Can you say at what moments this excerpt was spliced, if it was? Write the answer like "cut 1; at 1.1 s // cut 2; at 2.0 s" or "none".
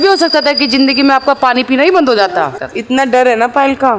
cut 1; at 2.6 s